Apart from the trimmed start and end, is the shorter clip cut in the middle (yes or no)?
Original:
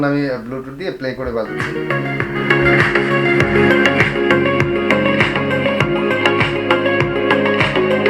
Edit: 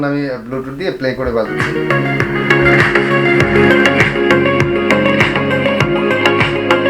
no